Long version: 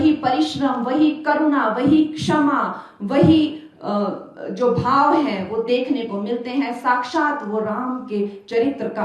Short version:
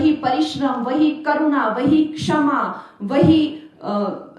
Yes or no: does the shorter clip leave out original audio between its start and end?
no